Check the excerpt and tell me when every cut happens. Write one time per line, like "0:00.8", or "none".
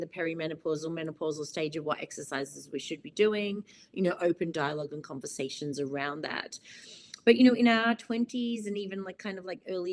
none